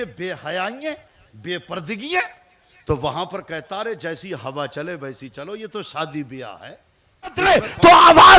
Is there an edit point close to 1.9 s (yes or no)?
no